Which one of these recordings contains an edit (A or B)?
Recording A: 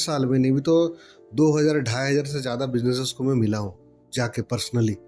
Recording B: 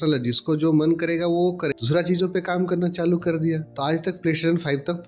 B